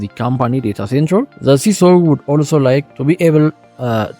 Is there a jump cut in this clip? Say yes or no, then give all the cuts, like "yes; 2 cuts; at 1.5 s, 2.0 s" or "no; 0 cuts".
yes; 2 cuts; at 1.3 s, 2.9 s